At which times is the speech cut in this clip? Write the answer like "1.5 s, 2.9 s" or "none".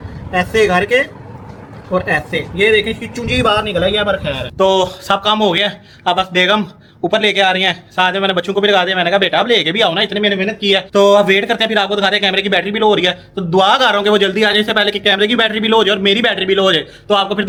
none